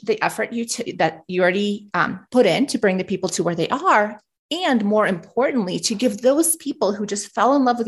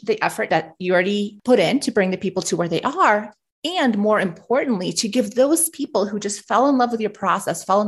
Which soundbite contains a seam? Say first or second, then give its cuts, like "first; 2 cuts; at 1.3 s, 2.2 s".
second; 1 cut; at 0.9 s